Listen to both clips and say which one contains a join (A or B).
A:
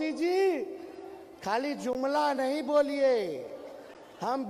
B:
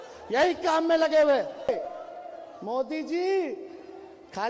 B